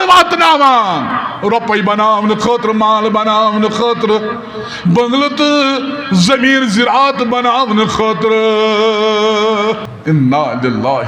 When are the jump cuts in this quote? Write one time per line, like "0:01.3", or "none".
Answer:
0:09.9